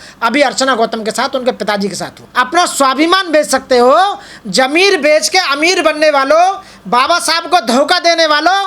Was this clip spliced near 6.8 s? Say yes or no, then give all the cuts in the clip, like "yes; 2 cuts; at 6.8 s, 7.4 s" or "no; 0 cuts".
no; 1 cut; at 2.2 s